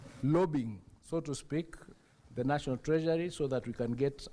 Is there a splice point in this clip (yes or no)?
no